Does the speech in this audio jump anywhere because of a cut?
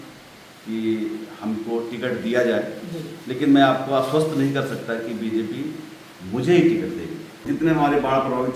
yes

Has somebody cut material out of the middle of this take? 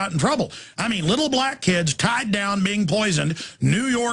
no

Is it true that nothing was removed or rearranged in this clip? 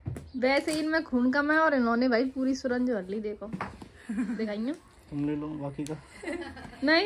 yes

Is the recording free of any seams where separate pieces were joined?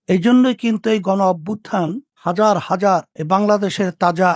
yes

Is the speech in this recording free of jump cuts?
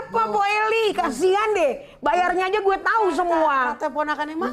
yes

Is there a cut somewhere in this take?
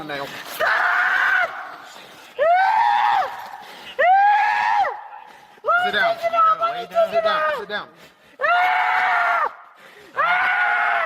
no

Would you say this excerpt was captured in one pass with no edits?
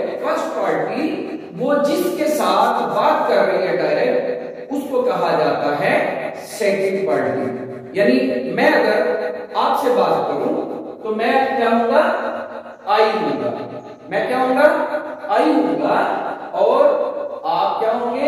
yes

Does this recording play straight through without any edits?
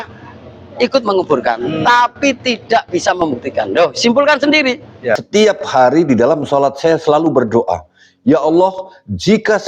no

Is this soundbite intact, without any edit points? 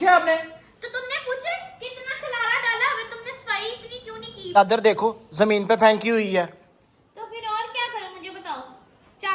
no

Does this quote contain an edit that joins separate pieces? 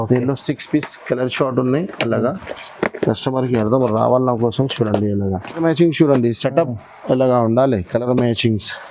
yes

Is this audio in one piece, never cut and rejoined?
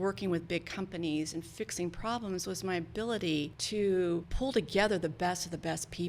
no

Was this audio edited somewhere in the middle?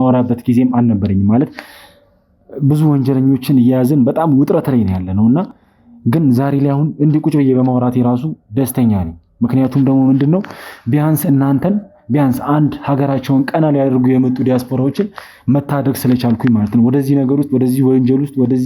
no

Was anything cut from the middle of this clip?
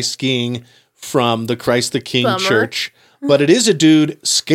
no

